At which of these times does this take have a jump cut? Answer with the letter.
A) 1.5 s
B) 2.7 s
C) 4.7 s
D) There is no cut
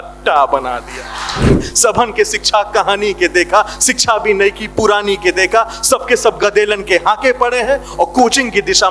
A